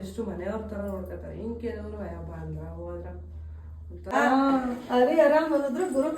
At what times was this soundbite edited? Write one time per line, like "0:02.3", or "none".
0:04.1